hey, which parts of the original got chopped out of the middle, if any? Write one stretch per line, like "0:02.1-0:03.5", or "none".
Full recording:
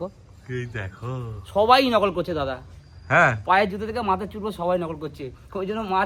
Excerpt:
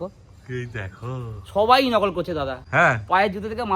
0:02.6-0:03.0